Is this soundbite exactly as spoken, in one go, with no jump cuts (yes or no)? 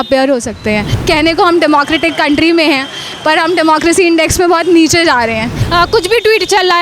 no